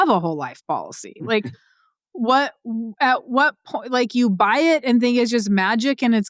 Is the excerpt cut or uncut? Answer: uncut